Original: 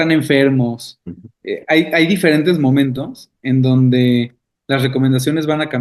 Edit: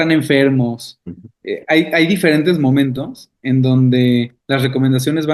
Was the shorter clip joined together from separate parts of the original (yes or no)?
yes